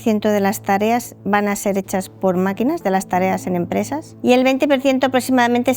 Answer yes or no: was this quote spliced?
no